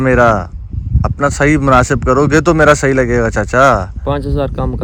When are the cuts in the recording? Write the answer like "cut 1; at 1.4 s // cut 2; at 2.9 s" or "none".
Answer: none